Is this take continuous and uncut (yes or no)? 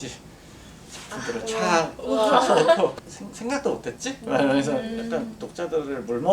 no